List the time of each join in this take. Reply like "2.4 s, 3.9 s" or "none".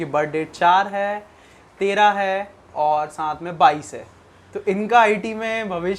none